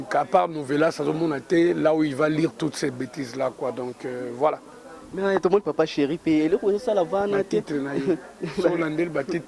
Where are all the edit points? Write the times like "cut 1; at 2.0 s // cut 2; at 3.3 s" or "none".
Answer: none